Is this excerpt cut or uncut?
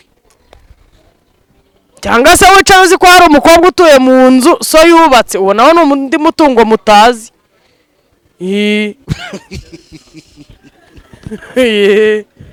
uncut